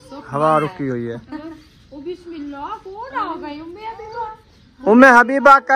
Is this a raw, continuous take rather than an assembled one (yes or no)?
yes